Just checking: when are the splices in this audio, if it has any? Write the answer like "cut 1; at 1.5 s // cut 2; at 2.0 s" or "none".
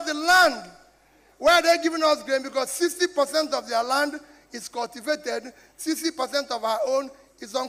none